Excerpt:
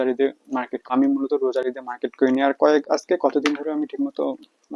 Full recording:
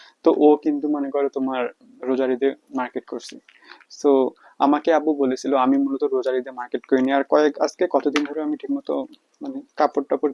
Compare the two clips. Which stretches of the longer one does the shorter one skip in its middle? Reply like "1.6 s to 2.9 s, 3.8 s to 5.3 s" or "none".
3.1 s to 5.6 s